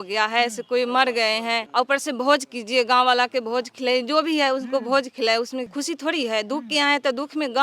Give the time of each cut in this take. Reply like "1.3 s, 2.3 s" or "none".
1.6 s, 5.7 s